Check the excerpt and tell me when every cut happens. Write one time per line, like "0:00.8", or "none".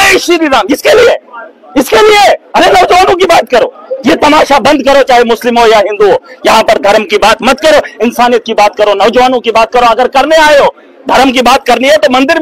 none